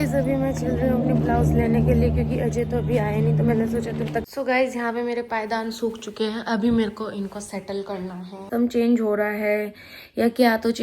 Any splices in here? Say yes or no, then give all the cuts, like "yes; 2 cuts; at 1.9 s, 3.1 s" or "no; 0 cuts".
yes; 2 cuts; at 4.3 s, 8.5 s